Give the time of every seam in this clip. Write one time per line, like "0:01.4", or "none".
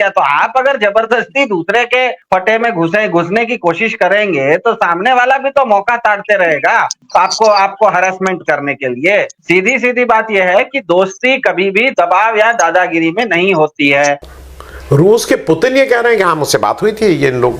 0:14.3